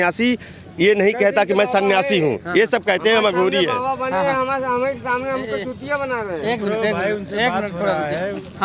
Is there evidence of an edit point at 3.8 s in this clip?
no; 0 cuts

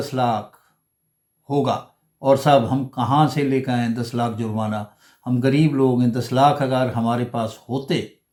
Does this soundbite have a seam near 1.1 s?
no; 0 cuts

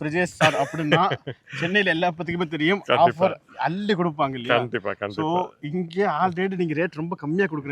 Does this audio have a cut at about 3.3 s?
no; 0 cuts

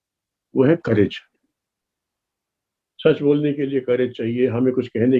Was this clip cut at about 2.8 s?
yes; 1 cut; at 2.8 s

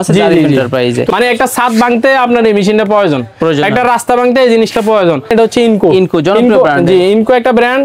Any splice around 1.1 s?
yes; 2 cuts; at 1.1 s, 5.3 s

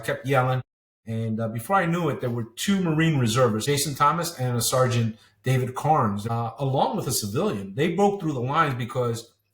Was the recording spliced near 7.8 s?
no; 2 cuts; at 3.6 s, 6.2 s

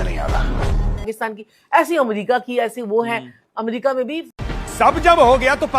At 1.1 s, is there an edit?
yes; 1 cut; at 1.1 s

